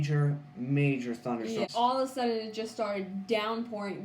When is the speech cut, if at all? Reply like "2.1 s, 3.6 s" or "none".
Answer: 1.7 s